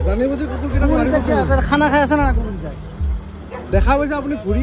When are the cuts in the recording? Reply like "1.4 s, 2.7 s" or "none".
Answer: none